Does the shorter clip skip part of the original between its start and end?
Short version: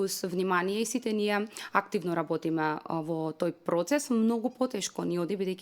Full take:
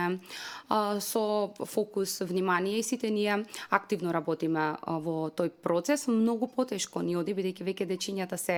no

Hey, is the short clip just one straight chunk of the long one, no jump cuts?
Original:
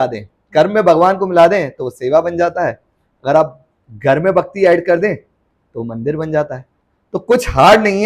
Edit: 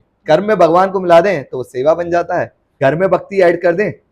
no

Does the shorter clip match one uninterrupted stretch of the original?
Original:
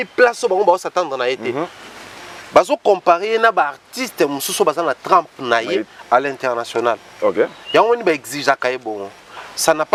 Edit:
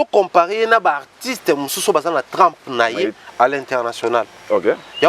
yes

